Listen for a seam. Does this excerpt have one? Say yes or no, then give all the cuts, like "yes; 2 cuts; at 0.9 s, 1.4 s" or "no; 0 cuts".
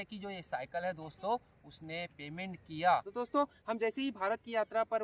yes; 1 cut; at 3.1 s